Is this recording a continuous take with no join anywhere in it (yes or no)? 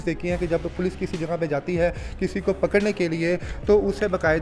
yes